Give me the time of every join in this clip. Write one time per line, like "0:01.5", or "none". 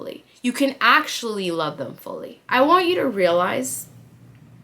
0:02.3